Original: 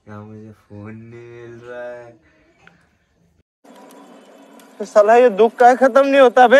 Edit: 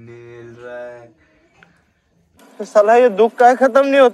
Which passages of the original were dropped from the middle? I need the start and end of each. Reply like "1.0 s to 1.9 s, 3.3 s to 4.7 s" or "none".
3.5 s to 4.6 s